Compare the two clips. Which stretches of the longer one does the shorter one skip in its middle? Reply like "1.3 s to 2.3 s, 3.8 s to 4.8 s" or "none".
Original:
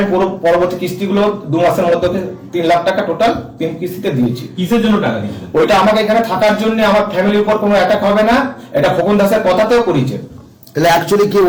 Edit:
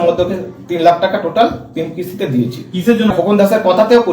5.0 s to 8.9 s